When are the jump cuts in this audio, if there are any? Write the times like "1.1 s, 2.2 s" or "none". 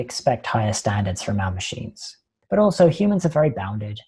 2.3 s